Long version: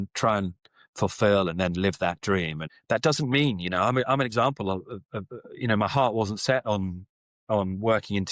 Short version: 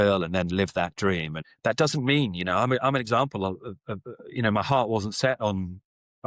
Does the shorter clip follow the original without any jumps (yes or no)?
yes